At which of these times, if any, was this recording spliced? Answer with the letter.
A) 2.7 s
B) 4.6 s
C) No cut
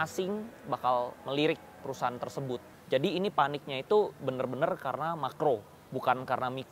A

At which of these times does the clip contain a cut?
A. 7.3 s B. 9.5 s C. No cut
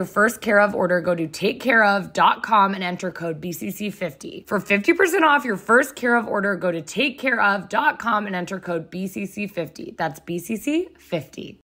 C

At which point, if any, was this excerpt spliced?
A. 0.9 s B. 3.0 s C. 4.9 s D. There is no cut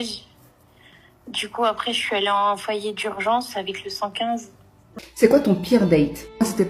C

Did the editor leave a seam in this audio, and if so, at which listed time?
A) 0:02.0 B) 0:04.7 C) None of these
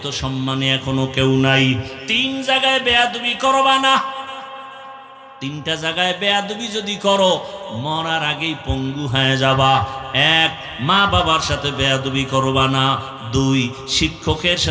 A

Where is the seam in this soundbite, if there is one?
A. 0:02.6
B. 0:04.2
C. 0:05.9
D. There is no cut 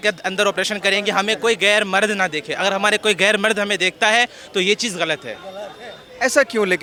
D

